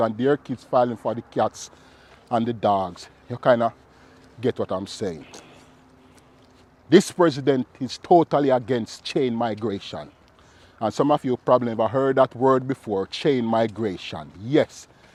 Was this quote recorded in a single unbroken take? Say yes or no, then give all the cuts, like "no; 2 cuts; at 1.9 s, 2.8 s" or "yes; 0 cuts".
yes; 0 cuts